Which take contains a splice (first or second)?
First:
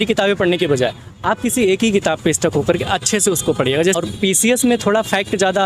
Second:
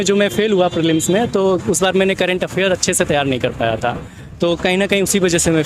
first